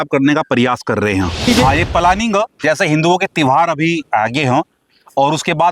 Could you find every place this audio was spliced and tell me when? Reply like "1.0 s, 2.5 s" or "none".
1.4 s